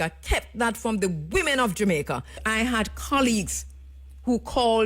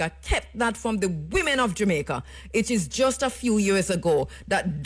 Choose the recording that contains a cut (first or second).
first